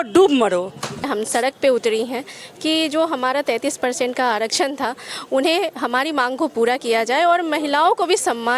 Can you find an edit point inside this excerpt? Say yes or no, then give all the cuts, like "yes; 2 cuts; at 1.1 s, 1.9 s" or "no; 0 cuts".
yes; 1 cut; at 1.1 s